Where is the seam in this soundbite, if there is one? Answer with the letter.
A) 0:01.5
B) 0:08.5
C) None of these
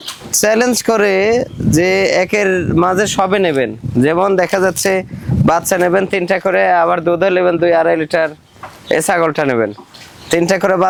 C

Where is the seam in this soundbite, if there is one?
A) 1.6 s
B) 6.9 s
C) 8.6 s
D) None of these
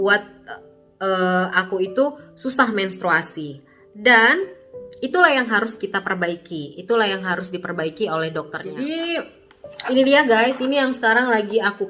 C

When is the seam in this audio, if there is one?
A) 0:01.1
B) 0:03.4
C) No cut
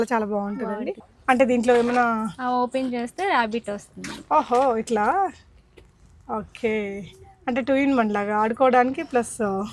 A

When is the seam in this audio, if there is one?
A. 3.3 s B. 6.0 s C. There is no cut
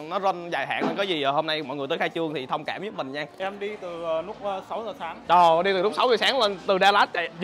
A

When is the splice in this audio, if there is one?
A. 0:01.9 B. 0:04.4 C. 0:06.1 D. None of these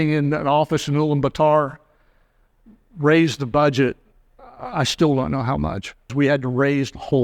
C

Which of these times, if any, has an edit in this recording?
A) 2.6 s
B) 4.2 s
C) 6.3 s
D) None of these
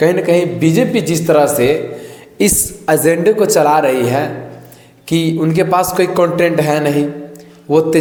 D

